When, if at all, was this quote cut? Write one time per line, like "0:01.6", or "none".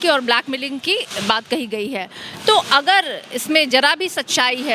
none